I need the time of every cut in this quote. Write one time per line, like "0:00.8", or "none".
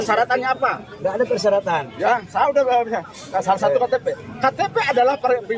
none

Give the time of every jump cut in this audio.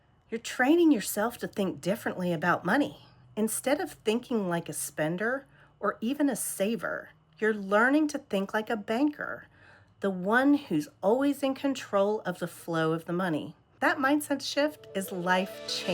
0:13.6

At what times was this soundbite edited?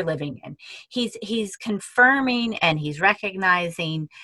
none

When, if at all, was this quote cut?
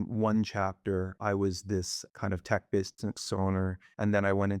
0:01.1
0:02.0

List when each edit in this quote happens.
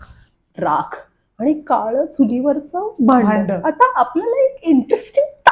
none

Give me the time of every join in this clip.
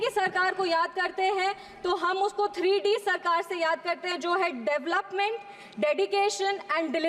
none

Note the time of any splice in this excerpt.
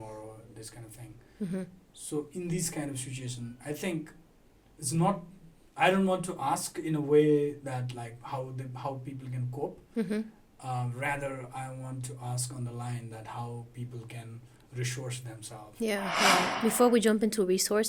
0:16.5

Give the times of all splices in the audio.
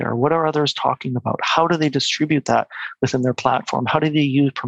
none

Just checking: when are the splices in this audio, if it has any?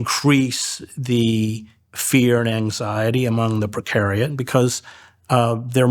0:04.4

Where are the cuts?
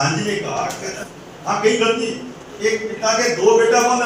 0:01.0

